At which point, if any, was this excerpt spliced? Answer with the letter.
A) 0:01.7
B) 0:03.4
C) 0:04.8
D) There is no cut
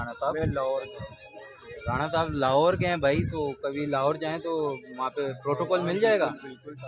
D